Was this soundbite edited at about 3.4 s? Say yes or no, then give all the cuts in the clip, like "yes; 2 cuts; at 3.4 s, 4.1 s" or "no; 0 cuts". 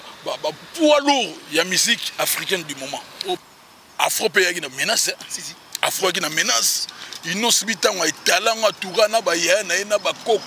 yes; 1 cut; at 3.4 s